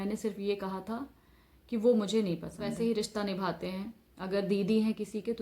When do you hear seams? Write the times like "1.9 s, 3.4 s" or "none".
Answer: 2.7 s